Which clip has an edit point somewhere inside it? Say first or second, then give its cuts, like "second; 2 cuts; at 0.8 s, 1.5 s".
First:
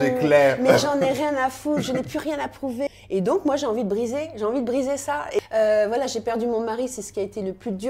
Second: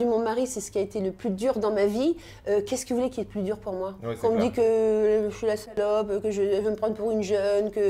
first; 2 cuts; at 2.9 s, 5.4 s